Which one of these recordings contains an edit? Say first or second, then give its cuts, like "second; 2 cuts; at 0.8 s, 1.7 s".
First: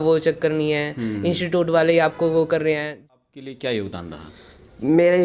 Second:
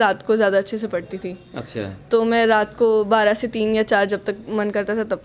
first; 1 cut; at 3.1 s